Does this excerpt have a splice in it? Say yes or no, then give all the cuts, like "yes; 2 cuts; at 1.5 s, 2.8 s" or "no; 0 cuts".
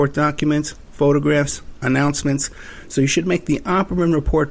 no; 0 cuts